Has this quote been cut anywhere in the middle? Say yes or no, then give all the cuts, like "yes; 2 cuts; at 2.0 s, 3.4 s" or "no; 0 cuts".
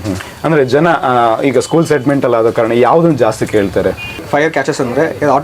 yes; 1 cut; at 4.2 s